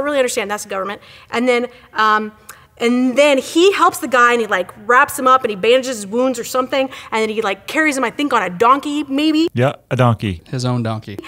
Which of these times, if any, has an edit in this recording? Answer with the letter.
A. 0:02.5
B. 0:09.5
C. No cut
C